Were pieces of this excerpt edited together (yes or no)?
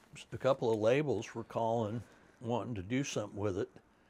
no